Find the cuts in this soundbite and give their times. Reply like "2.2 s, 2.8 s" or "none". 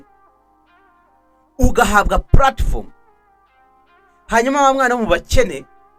none